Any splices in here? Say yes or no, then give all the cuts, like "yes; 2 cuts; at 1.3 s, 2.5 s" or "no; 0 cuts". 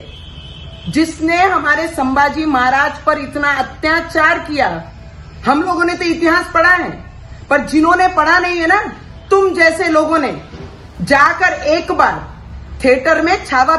no; 0 cuts